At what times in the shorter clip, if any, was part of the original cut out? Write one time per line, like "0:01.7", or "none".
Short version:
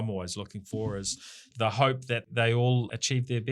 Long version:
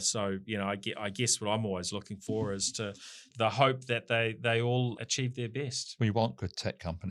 0:01.2
0:02.3